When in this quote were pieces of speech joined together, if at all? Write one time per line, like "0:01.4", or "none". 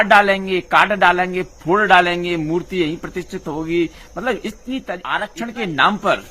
0:05.3